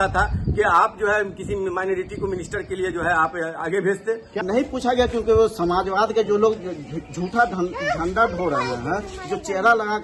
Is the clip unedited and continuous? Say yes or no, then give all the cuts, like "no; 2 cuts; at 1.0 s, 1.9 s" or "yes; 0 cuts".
no; 1 cut; at 4.3 s